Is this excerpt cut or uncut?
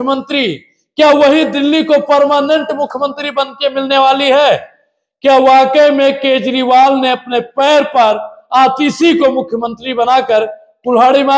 uncut